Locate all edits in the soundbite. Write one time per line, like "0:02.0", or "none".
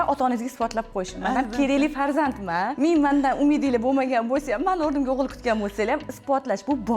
0:02.7